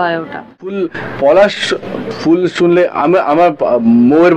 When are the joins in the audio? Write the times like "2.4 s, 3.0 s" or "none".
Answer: 0.9 s